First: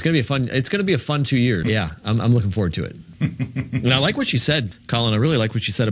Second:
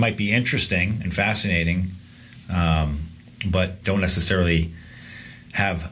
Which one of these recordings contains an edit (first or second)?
first